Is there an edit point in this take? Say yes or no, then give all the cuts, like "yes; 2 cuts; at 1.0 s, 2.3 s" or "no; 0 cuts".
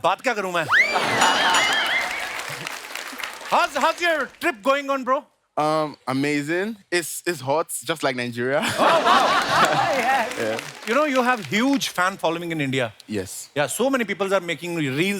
no; 0 cuts